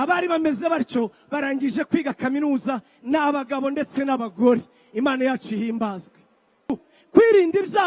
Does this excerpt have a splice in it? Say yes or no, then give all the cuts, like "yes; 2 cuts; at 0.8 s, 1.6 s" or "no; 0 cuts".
yes; 1 cut; at 6.8 s